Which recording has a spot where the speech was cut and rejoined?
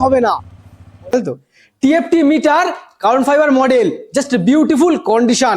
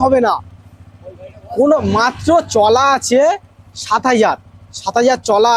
first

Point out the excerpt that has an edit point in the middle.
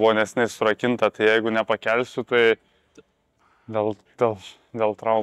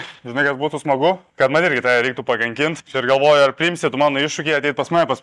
second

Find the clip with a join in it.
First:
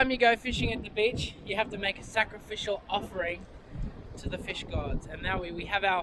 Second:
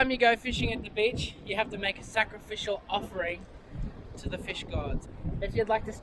second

